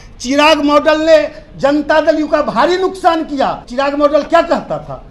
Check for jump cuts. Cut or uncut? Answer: cut